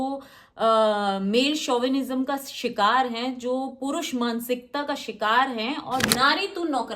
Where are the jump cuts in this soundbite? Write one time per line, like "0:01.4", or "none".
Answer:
0:06.1